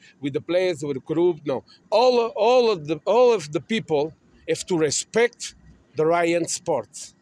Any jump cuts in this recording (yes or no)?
yes